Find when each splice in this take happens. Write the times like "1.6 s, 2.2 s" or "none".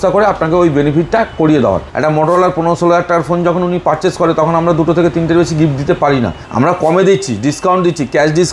1.9 s, 6.4 s